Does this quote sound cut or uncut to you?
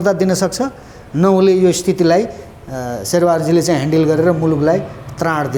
uncut